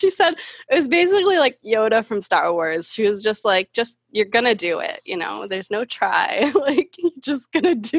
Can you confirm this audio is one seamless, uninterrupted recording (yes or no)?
yes